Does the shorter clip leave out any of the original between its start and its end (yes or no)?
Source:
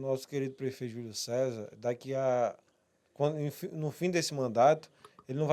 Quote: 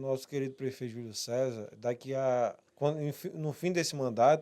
yes